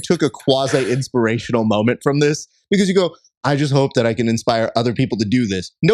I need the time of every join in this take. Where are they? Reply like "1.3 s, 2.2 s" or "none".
none